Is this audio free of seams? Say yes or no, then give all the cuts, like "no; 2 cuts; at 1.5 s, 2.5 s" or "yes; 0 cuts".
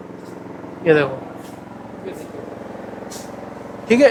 yes; 0 cuts